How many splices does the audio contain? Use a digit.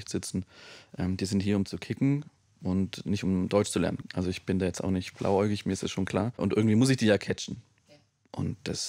2